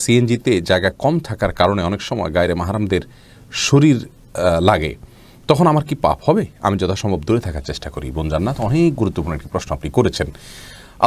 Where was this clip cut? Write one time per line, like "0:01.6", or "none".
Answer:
none